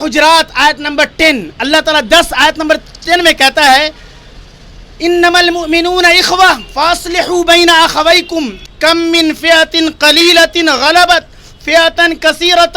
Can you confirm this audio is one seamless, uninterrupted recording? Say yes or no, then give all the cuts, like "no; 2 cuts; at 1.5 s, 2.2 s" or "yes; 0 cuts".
no; 1 cut; at 8.6 s